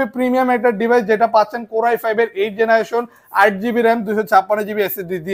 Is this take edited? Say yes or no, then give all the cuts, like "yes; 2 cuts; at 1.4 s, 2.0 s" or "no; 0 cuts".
no; 0 cuts